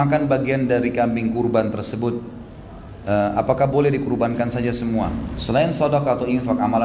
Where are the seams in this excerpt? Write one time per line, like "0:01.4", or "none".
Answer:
0:05.3